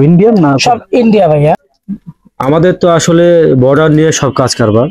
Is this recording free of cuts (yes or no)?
no